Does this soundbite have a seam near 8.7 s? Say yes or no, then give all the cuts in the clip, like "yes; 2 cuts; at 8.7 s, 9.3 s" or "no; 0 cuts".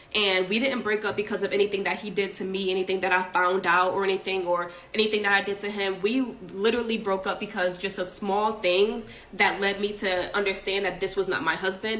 no; 1 cut; at 10.2 s